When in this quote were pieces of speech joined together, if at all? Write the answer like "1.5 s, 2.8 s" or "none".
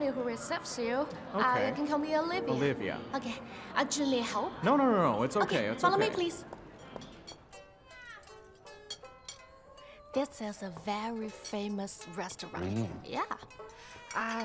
7.3 s